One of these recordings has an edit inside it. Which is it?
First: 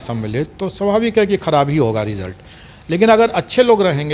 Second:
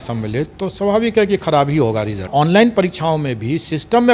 second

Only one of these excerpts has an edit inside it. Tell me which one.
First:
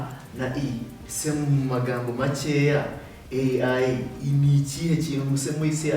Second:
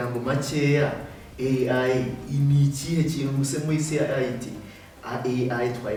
first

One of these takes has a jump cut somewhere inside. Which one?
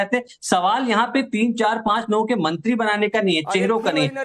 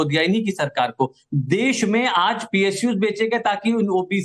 second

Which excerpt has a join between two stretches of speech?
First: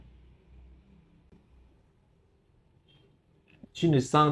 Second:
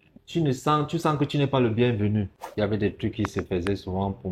second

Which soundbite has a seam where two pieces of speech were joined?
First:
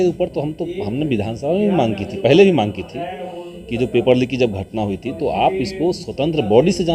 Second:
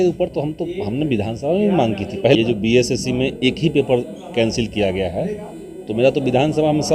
second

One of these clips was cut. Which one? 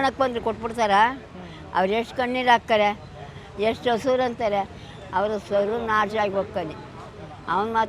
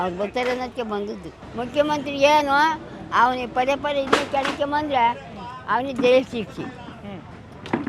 second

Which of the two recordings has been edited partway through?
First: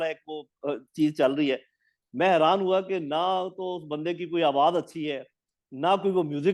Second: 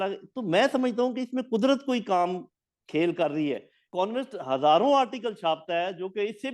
second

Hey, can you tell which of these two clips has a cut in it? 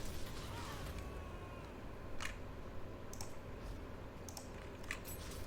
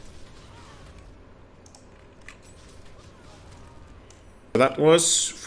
second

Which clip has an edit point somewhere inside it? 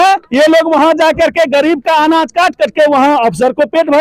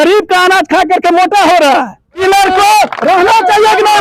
second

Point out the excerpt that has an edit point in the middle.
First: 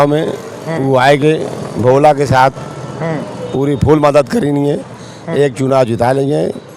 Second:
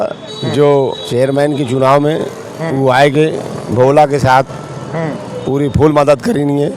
second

